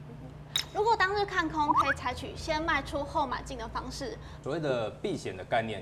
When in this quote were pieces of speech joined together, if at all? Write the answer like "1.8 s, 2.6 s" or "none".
4.3 s